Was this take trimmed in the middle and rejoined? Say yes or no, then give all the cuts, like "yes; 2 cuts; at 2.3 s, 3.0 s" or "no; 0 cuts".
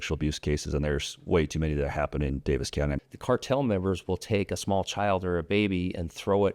yes; 1 cut; at 3.0 s